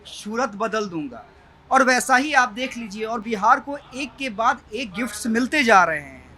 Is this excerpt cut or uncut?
uncut